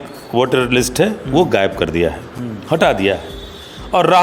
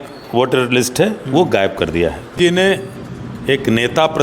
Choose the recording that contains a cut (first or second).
second